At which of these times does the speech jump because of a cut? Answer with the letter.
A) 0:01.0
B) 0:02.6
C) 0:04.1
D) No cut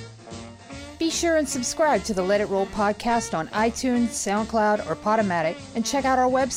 A